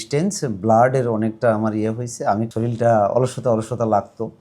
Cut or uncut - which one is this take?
cut